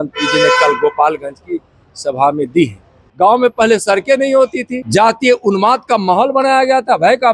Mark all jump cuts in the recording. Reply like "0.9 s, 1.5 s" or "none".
3.0 s, 4.8 s